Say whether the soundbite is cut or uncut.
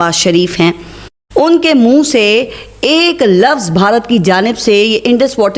uncut